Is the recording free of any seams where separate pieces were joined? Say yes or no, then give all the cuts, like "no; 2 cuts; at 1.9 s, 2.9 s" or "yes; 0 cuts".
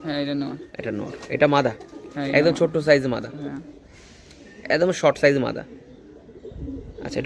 yes; 0 cuts